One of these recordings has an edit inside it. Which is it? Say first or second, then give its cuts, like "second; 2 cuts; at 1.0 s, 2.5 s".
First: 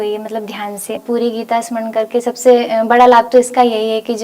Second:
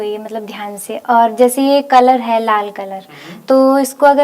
first; 1 cut; at 1.0 s